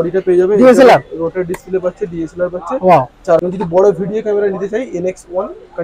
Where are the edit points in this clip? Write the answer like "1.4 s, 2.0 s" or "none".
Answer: 3.4 s